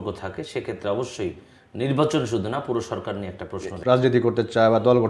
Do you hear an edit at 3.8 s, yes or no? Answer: yes